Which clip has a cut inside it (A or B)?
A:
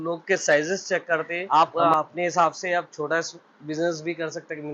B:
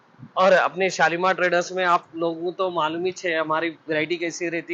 A